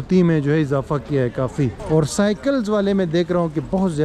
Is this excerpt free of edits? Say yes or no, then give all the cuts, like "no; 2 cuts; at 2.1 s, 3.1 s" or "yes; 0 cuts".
no; 1 cut; at 1.8 s